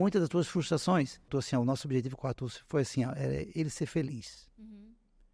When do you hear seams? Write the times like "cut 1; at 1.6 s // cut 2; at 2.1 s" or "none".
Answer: cut 1; at 1.3 s